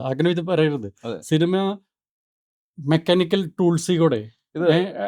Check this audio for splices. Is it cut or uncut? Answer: uncut